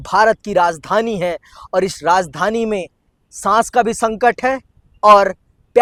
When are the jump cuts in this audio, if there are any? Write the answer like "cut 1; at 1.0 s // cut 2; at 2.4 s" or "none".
none